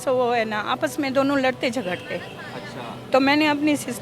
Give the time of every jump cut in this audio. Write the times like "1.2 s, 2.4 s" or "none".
none